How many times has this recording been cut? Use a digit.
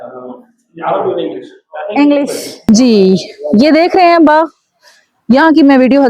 1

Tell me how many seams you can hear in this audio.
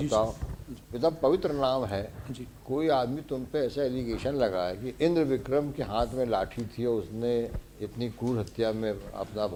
0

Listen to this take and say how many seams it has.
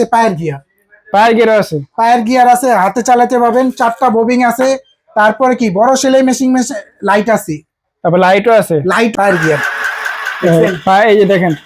1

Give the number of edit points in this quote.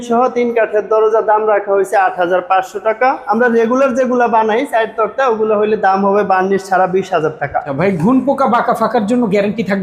2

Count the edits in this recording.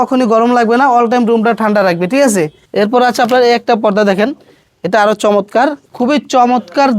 2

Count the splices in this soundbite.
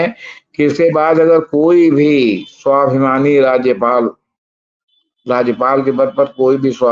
0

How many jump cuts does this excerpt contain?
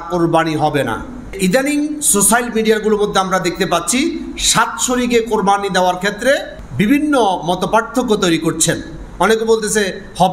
2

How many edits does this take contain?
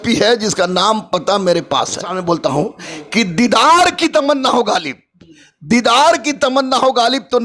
1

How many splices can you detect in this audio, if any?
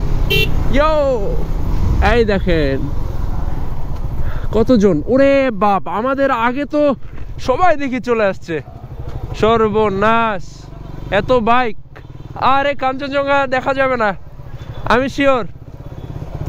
0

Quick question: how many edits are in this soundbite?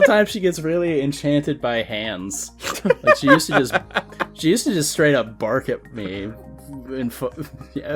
0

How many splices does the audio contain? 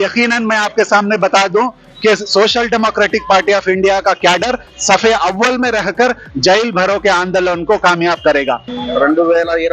1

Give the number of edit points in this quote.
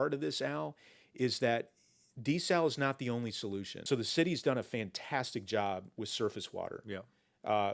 1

